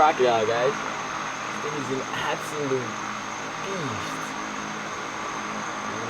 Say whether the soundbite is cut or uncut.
uncut